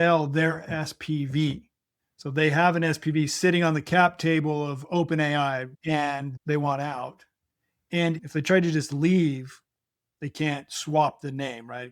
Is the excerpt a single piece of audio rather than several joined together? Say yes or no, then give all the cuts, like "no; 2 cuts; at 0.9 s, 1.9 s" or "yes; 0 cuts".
no; 2 cuts; at 5.7 s, 8.2 s